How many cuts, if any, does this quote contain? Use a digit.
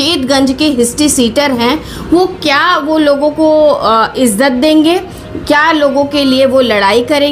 0